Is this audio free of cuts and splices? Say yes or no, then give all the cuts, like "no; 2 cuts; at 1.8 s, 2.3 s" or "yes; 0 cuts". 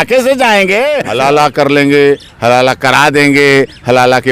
no; 1 cut; at 1.0 s